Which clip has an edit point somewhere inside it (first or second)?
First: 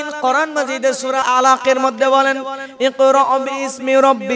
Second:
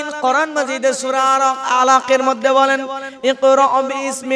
first